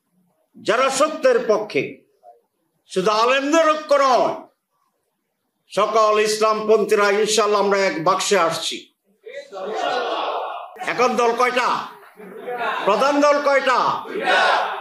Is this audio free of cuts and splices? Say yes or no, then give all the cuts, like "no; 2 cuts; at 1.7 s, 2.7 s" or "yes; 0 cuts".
no; 1 cut; at 10.7 s